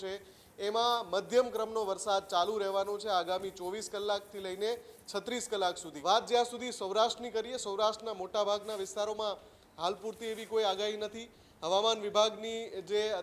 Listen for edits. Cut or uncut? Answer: cut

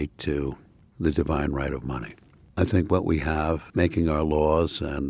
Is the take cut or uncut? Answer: cut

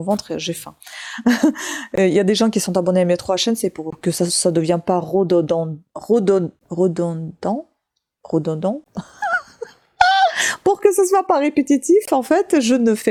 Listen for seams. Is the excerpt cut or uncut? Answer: uncut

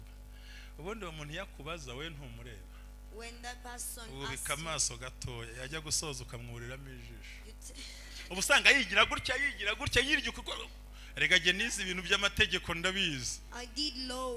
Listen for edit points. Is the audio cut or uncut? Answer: uncut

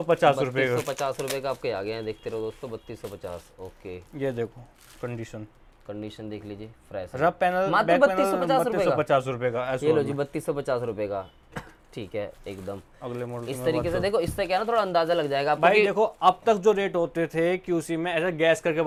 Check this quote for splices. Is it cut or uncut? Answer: uncut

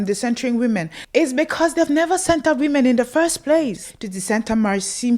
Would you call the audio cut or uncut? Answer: cut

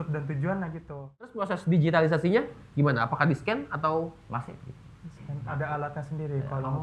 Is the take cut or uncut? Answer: cut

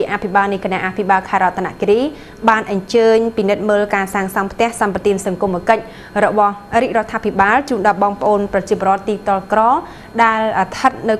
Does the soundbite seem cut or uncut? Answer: uncut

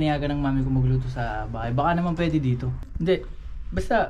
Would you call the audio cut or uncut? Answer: cut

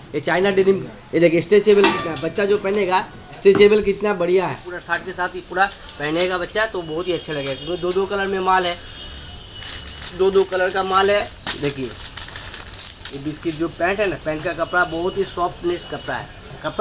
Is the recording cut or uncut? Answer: cut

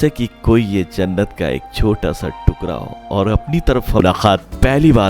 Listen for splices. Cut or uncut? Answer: cut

